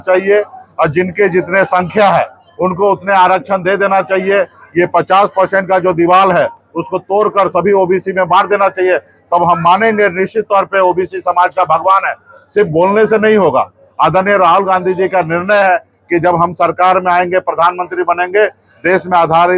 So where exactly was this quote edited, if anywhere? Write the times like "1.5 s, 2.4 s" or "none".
none